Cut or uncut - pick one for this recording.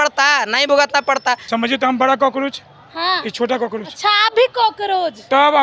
cut